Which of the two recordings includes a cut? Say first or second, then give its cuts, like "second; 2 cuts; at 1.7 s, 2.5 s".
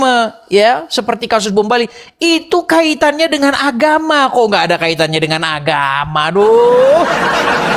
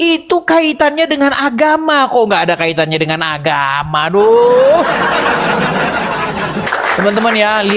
second; 1 cut; at 6.7 s